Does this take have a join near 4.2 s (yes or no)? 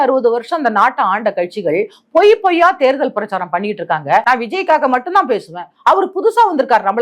yes